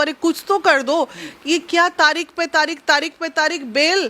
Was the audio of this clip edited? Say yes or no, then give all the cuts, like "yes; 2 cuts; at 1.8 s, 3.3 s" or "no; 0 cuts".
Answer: no; 0 cuts